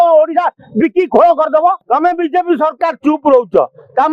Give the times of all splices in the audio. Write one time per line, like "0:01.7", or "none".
0:01.8